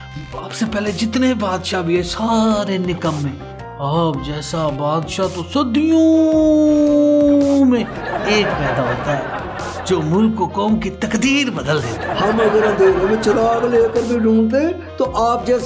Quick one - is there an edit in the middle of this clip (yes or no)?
no